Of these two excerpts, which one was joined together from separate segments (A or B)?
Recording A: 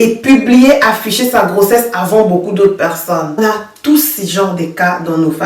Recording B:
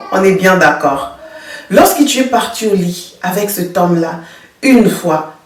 A